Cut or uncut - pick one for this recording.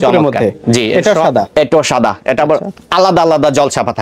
cut